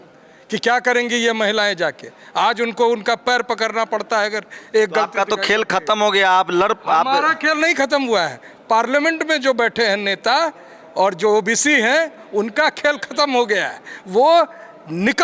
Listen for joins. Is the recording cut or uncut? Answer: uncut